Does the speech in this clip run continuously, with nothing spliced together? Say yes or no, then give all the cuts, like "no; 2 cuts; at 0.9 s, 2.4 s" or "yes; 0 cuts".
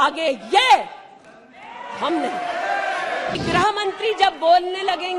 no; 1 cut; at 3.4 s